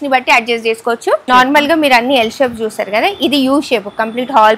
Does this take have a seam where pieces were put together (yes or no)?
yes